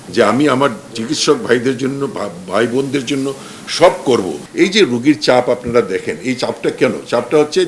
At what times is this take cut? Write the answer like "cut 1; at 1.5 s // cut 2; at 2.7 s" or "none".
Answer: cut 1; at 4.4 s